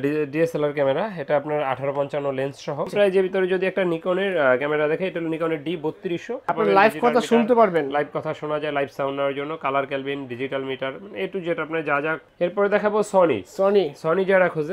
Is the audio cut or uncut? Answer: cut